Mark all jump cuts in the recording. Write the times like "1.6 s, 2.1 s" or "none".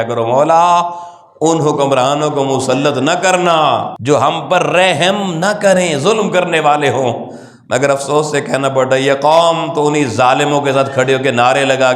3.9 s